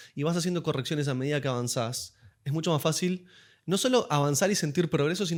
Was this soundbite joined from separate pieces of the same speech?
no; 0 cuts

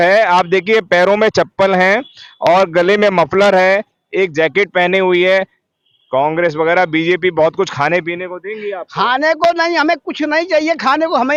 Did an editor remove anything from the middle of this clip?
no; 0 cuts

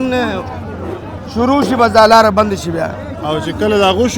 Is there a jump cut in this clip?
no; 0 cuts

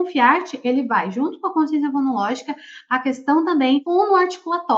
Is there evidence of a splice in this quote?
yes; 1 cut; at 3.8 s

